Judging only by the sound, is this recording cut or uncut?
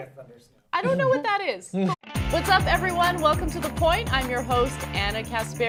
uncut